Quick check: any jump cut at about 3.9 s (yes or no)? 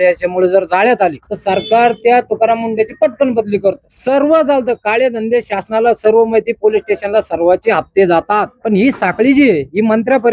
yes